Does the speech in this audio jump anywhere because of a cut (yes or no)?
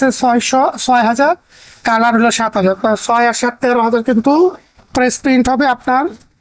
no